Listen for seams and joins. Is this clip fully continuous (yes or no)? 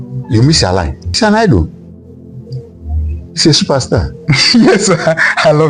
yes